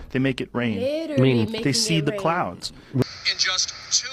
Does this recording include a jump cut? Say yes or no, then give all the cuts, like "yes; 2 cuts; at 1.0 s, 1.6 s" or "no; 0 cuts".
yes; 1 cut; at 3.0 s